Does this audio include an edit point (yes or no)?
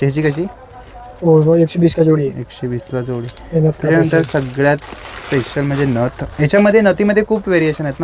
no